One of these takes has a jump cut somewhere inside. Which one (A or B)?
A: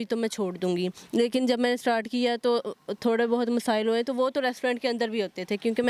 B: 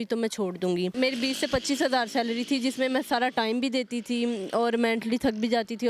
B